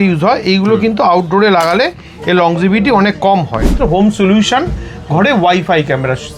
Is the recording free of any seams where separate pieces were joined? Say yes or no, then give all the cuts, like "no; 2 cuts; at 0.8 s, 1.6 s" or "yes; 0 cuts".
no; 1 cut; at 3.8 s